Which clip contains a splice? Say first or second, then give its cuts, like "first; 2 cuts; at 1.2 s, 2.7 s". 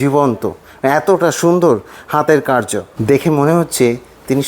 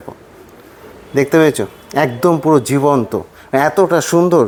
first; 1 cut; at 3.0 s